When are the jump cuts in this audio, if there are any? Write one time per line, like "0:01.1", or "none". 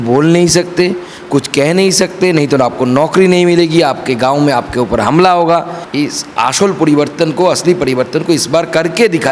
0:05.8